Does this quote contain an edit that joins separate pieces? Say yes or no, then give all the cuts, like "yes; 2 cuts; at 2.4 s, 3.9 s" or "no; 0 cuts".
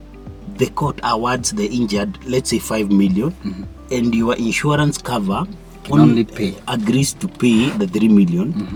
no; 0 cuts